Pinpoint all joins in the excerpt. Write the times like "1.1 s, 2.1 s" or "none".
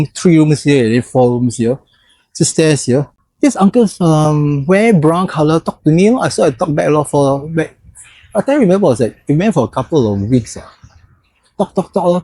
3.2 s